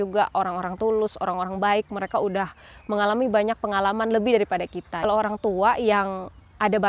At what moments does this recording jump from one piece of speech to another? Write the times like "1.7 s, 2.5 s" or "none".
5.0 s